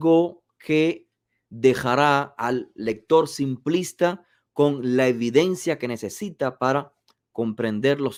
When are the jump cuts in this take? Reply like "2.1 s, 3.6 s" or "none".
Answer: none